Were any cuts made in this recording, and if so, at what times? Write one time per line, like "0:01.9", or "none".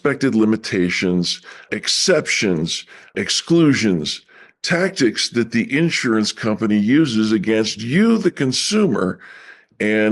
0:01.7
0:03.2